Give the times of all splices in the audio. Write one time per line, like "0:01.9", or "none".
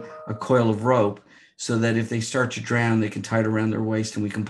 none